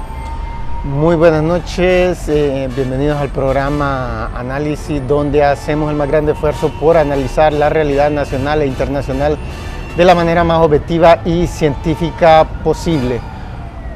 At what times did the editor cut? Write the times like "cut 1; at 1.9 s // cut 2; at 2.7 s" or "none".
cut 1; at 4.1 s